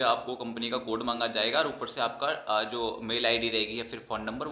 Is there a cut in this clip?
no; 0 cuts

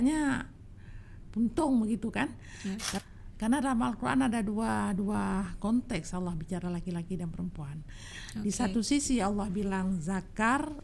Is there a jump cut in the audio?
yes; 1 cut; at 2.9 s

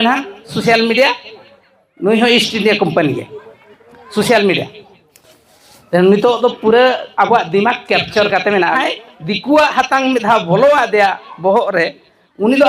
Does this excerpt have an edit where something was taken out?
yes; 1 cut; at 8.7 s

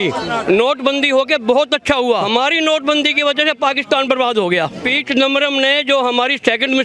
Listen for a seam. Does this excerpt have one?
yes; 2 cuts; at 2.3 s, 4.9 s

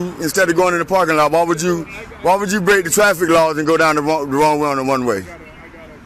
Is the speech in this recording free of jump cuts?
yes; 0 cuts

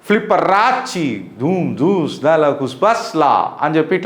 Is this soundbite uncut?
yes; 0 cuts

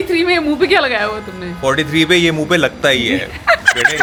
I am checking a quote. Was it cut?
no; 0 cuts

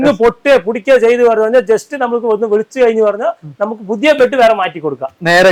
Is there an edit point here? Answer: no; 0 cuts

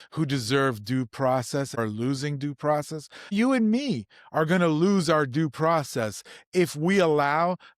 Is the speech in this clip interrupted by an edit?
yes; 2 cuts; at 1.8 s, 3.3 s

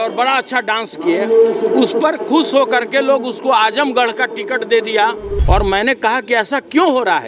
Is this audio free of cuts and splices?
no; 1 cut; at 5.3 s

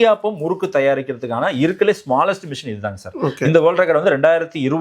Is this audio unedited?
yes; 0 cuts

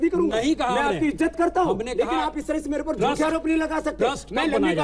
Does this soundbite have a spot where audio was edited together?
no; 0 cuts

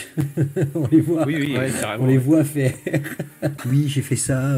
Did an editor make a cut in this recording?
yes; 1 cut; at 3.6 s

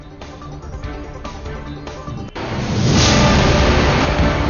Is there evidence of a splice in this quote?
no; 0 cuts

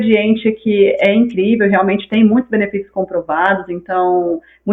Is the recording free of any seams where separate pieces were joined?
yes; 0 cuts

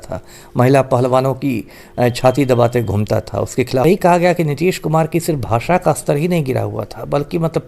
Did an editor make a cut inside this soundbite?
yes; 1 cut; at 3.8 s

